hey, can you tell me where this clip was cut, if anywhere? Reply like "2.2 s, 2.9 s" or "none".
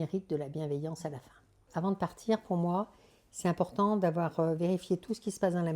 1.7 s